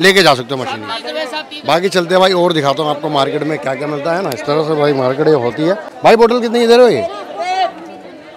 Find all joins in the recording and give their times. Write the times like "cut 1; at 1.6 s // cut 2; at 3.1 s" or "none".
none

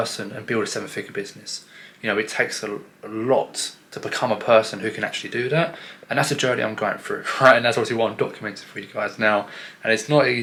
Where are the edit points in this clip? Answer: none

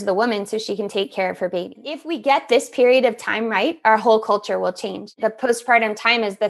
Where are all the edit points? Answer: cut 1; at 2.1 s // cut 2; at 5.1 s

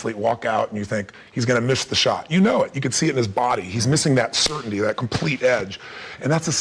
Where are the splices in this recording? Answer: cut 1; at 5.0 s

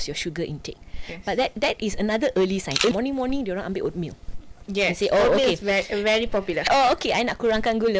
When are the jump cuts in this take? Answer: cut 1; at 2.9 s // cut 2; at 6.7 s

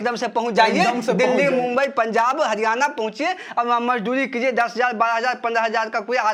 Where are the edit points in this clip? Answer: none

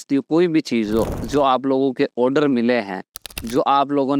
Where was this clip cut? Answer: cut 1; at 1.2 s

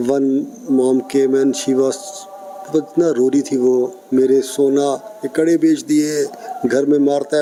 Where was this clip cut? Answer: none

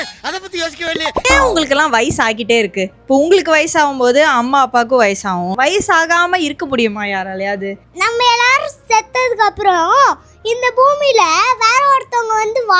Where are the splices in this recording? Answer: cut 1; at 1.2 s // cut 2; at 5.5 s // cut 3; at 7.9 s

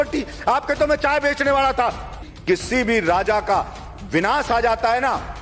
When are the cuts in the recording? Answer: cut 1; at 2.3 s

